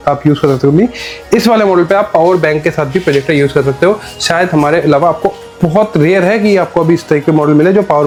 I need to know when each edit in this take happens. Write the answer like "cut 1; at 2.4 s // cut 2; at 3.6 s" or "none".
none